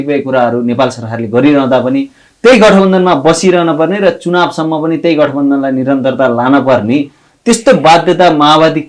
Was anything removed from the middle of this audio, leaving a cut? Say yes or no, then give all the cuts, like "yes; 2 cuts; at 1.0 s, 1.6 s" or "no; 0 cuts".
no; 0 cuts